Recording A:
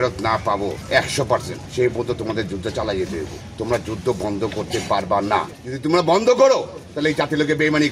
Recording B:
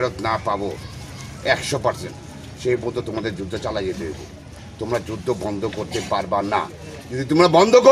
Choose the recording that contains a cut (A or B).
A